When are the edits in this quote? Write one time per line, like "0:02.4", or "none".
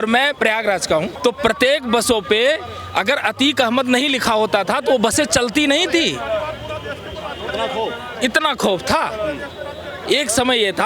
0:01.1